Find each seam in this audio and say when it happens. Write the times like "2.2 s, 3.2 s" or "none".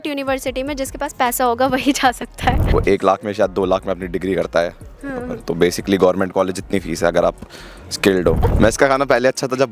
2.6 s, 8.4 s